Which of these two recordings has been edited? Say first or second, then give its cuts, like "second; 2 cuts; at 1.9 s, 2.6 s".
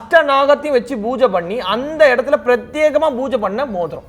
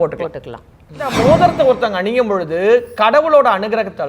second; 1 cut; at 1.1 s